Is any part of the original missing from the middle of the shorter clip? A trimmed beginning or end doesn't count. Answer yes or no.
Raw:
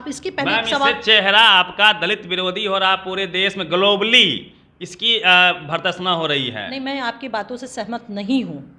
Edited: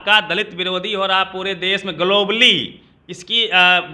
no